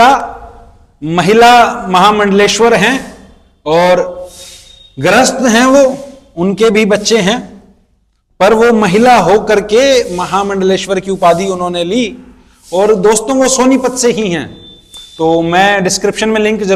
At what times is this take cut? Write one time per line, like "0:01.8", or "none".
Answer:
none